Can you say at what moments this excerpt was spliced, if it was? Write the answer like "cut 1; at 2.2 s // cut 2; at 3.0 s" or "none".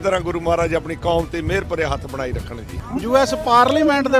cut 1; at 2.8 s